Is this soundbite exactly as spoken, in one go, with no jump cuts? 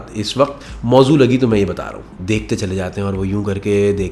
no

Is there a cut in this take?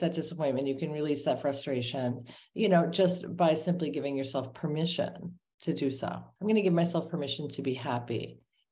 yes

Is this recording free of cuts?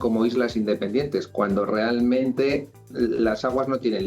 no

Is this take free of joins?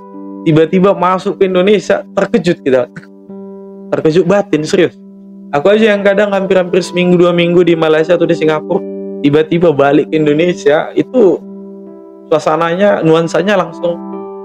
yes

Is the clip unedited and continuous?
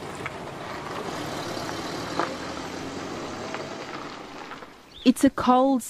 no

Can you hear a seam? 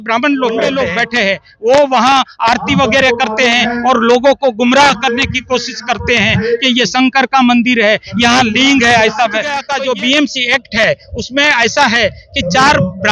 yes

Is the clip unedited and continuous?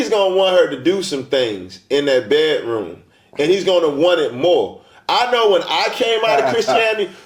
yes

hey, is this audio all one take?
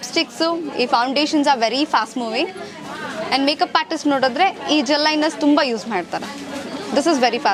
yes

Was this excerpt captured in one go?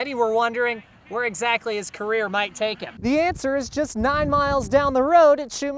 yes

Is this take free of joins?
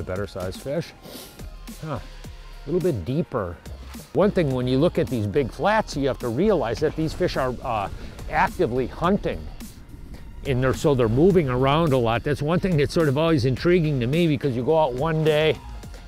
no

